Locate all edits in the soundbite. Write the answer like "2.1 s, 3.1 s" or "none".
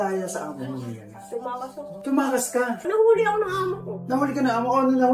2.8 s